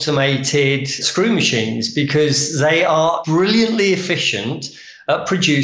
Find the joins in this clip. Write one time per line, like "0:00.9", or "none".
0:01.0
0:03.2

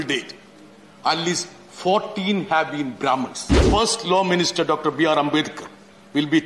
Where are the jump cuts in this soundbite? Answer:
0:03.6

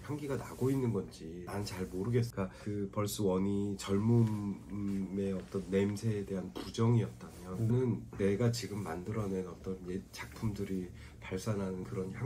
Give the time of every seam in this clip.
0:01.4
0:02.3

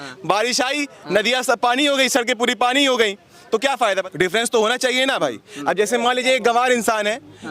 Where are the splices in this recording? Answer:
0:04.0

